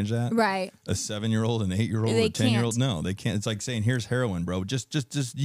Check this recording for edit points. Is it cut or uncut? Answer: uncut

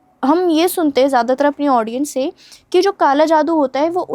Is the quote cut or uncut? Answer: uncut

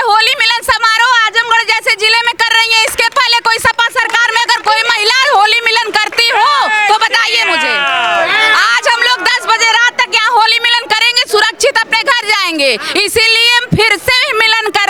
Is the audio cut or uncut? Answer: uncut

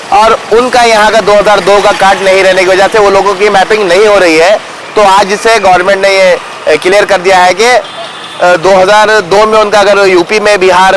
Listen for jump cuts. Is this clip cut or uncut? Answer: uncut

